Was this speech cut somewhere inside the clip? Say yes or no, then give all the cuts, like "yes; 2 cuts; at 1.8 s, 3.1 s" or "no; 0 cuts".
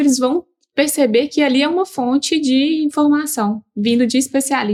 no; 0 cuts